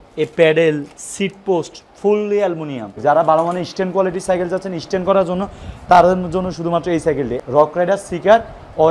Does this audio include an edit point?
yes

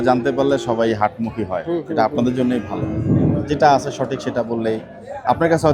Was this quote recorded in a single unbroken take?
yes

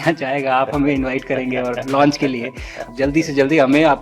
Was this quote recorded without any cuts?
no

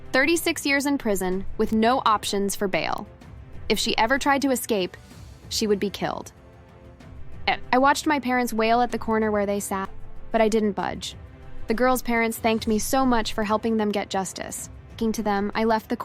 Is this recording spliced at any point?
yes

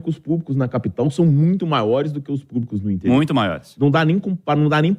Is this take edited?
no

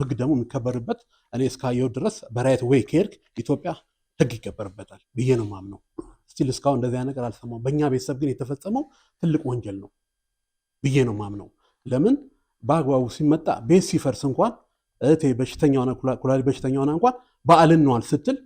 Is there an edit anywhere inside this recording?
no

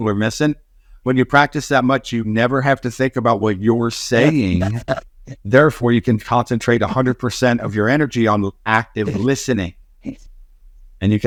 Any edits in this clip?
no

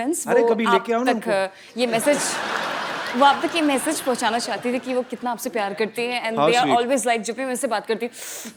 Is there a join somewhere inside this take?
no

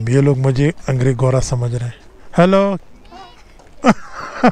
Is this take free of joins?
no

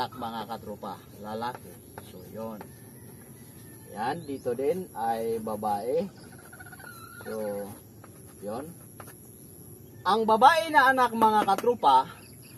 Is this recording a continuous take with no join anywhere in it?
yes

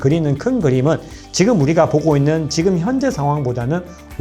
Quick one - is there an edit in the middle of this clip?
no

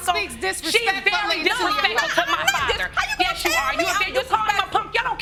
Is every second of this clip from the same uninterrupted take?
yes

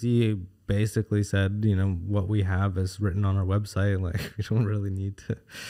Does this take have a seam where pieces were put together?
no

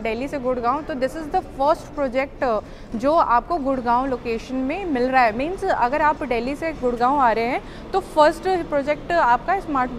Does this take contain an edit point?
no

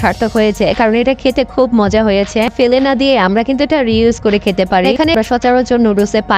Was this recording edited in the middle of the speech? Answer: yes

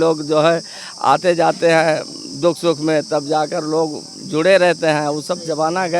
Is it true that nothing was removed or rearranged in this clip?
yes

